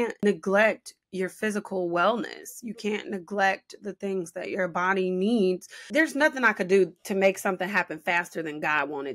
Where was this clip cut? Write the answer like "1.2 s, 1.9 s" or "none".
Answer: 5.8 s